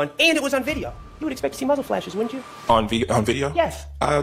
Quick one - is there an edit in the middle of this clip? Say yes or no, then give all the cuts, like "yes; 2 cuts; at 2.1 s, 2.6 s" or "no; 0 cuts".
no; 0 cuts